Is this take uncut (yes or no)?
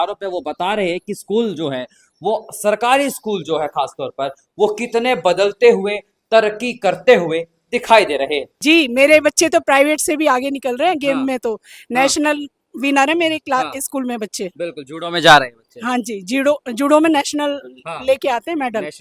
no